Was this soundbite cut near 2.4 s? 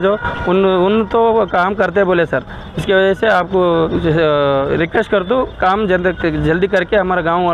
no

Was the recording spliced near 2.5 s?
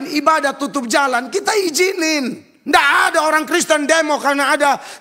yes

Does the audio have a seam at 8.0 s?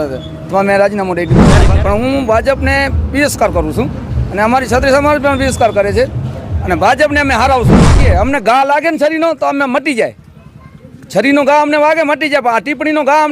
yes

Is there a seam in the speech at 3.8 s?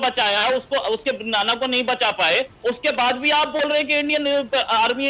no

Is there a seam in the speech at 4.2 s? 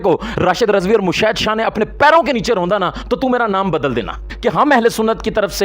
yes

